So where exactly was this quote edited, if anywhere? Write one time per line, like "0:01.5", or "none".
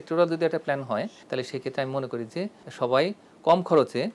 0:02.6